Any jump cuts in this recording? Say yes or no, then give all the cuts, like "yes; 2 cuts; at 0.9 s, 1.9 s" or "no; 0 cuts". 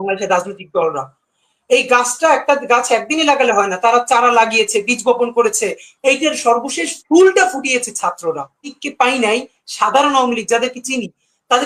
yes; 1 cut; at 8.8 s